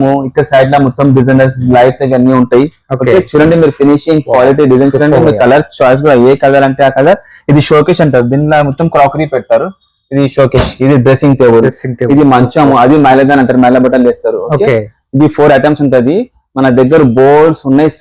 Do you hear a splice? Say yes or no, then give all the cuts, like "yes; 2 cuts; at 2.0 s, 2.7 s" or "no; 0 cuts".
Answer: no; 0 cuts